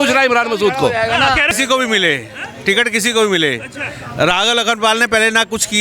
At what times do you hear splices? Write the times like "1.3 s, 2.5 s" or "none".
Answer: 1.5 s